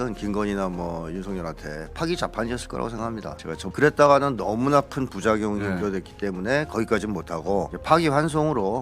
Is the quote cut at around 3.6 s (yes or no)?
yes